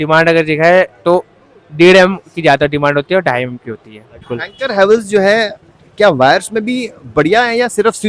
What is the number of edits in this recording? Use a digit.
1